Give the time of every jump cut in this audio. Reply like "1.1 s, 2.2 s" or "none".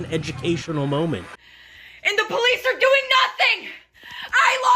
1.4 s